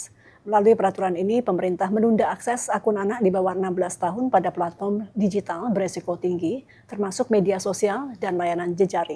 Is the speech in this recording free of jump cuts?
yes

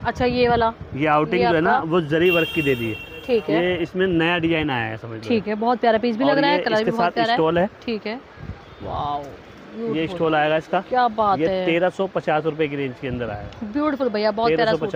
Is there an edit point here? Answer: no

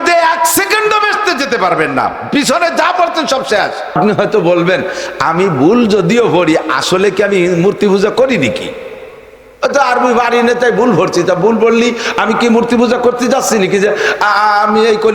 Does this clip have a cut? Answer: yes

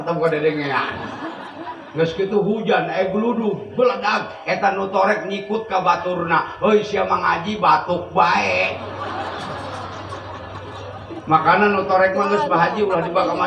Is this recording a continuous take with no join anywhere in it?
yes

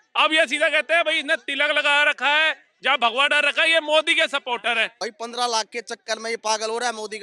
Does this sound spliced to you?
yes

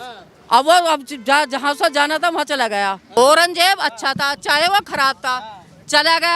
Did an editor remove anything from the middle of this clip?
yes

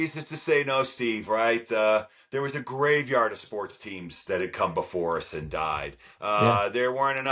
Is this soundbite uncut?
yes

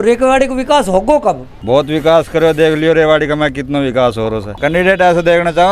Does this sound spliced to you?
yes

